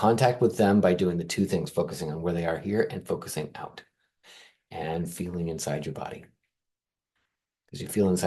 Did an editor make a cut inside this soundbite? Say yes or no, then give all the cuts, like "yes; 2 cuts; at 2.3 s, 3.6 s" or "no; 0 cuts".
no; 0 cuts